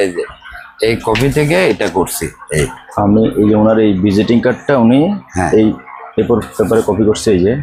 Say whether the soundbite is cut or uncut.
uncut